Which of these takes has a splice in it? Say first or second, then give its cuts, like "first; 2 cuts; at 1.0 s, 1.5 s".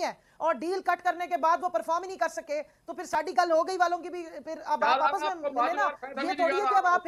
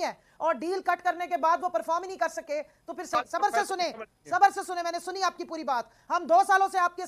second; 1 cut; at 3.1 s